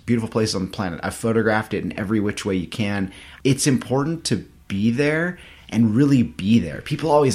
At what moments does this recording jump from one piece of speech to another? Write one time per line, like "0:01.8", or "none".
0:03.2